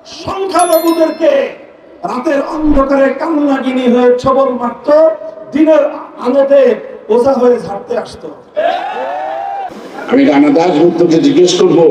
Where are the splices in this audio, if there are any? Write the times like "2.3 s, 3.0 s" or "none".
9.7 s